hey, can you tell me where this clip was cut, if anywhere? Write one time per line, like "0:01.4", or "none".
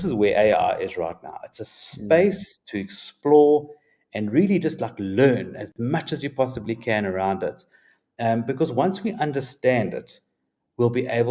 none